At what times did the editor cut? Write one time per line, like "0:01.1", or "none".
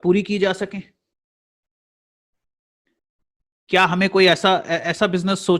0:04.5